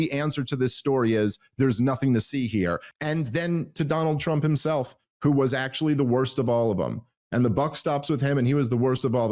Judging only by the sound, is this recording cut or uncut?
cut